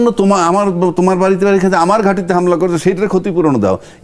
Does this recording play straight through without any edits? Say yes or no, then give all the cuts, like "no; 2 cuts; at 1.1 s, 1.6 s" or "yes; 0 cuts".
yes; 0 cuts